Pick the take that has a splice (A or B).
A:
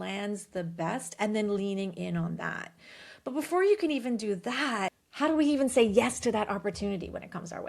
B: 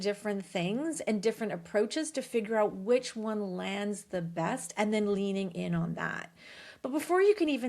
A